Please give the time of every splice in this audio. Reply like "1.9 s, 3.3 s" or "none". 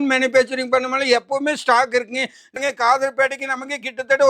2.6 s